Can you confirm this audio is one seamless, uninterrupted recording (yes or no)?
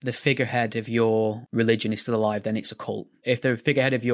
no